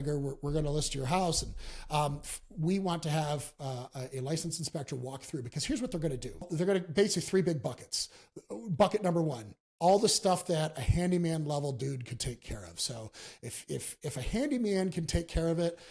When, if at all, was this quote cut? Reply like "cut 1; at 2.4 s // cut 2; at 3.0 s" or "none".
cut 1; at 6.5 s